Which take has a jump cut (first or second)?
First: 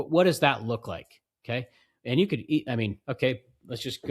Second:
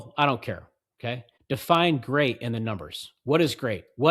second